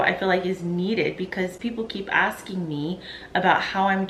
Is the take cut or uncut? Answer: uncut